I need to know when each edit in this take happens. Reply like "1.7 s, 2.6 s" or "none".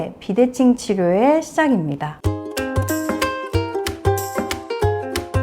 2.0 s